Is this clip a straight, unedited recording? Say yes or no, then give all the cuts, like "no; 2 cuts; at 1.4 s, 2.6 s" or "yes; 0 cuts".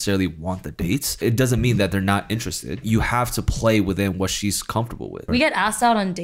no; 3 cuts; at 1.2 s, 2.8 s, 5.2 s